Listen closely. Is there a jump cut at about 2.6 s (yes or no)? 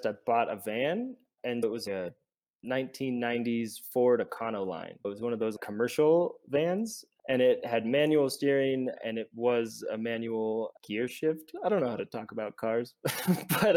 no